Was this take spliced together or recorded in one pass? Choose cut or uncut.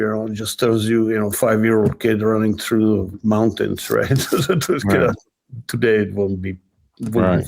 uncut